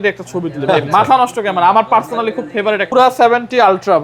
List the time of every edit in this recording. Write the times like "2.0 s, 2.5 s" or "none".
2.8 s